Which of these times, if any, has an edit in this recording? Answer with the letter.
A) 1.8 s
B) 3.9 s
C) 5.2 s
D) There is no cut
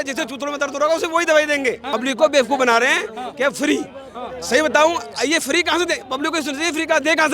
A